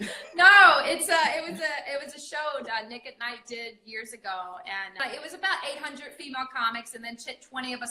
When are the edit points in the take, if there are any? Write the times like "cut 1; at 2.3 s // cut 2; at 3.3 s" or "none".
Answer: cut 1; at 5.0 s